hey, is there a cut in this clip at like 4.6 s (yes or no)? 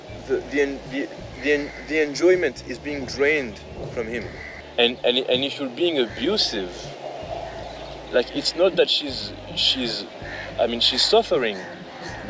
yes